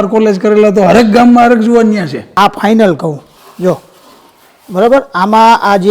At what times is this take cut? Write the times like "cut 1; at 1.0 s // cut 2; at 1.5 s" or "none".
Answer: cut 1; at 2.3 s